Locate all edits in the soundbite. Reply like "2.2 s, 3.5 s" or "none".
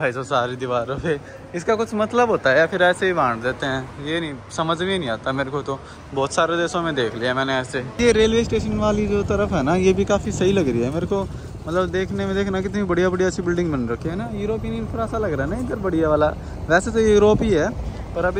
none